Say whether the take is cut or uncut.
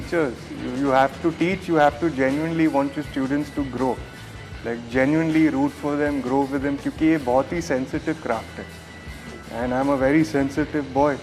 uncut